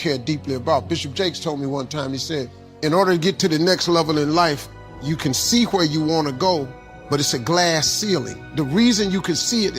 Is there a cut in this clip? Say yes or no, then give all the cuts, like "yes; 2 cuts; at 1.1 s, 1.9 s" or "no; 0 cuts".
yes; 1 cut; at 2.6 s